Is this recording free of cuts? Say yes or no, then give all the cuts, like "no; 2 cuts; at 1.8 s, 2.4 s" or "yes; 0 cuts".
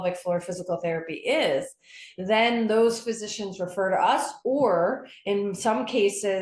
yes; 0 cuts